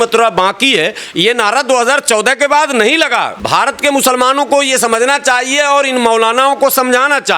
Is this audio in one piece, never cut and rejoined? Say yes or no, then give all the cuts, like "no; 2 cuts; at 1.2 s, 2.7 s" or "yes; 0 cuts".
no; 1 cut; at 3.4 s